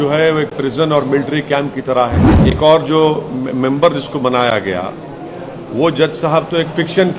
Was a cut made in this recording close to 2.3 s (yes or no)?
yes